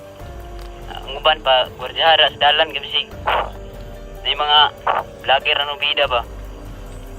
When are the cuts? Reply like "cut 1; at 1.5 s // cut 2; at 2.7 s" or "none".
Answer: cut 1; at 1.0 s